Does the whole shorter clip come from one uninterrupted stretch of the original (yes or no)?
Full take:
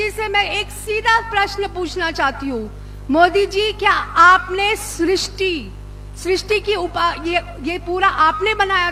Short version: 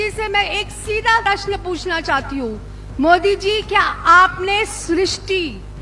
no